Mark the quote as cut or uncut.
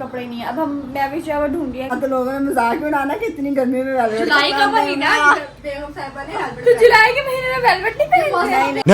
cut